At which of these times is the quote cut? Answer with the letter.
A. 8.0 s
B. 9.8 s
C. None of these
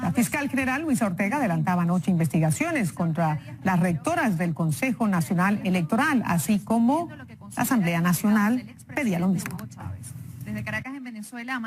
A